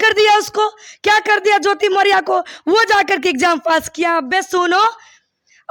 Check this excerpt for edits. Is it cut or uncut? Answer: uncut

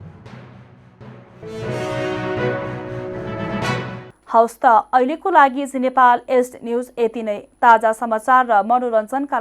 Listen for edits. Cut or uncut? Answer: uncut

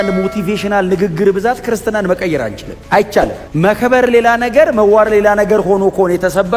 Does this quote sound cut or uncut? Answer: uncut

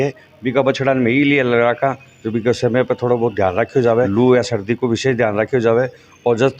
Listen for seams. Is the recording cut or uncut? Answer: cut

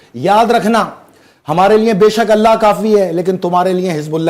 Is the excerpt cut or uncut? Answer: uncut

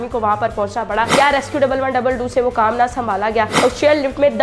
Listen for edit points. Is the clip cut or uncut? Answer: cut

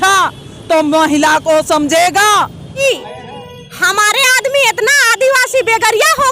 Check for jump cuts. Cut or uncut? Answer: cut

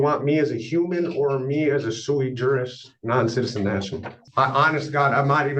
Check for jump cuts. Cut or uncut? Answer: cut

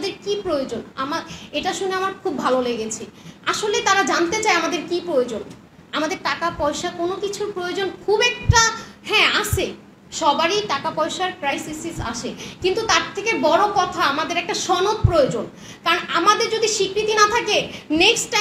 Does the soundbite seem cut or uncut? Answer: uncut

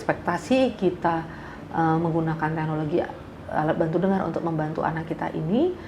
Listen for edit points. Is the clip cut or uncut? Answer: uncut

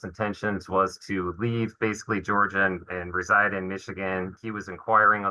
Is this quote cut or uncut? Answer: cut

